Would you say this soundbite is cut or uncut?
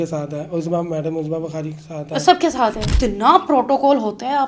cut